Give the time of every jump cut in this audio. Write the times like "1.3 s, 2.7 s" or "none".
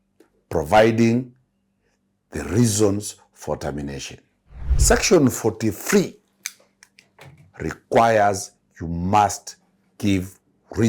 4.7 s